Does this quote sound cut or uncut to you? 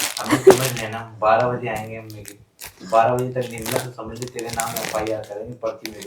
uncut